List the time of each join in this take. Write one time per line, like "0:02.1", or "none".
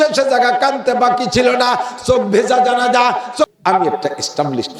0:03.5